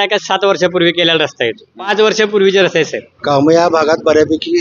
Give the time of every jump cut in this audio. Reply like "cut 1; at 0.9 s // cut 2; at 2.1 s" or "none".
cut 1; at 1.9 s // cut 2; at 3.1 s